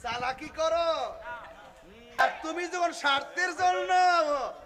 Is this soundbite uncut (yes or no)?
no